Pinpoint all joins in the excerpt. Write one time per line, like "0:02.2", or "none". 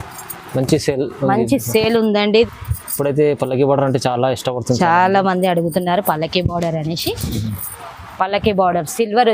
0:02.5